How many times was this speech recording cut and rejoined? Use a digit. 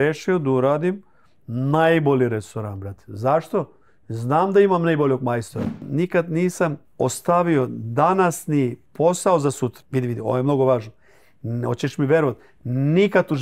4